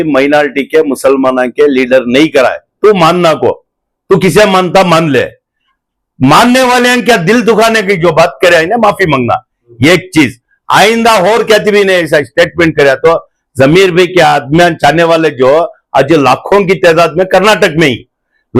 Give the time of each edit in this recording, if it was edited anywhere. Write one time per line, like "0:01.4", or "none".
none